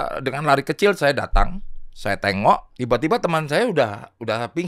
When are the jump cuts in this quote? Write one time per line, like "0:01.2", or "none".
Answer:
0:02.7